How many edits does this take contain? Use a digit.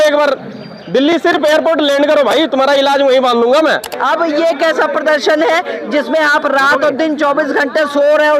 1